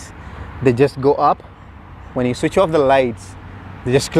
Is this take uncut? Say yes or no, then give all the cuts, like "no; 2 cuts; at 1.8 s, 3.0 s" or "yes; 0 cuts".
yes; 0 cuts